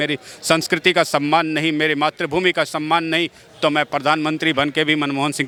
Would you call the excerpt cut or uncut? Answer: uncut